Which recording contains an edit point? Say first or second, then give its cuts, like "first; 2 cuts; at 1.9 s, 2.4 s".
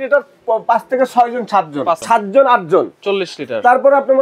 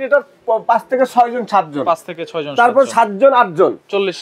first; 1 cut; at 2.0 s